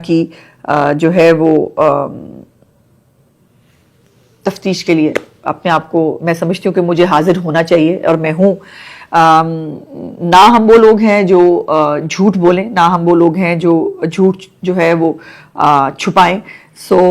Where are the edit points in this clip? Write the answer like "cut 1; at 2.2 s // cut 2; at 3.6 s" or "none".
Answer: none

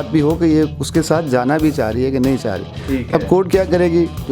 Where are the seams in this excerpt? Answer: none

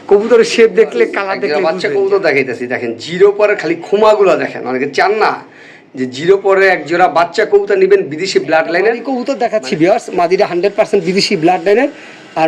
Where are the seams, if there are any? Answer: cut 1; at 1.6 s // cut 2; at 9.1 s

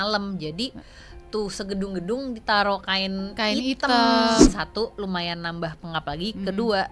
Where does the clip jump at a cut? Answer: cut 1; at 4.4 s

